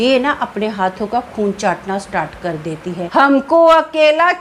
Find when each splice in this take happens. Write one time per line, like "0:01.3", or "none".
0:02.9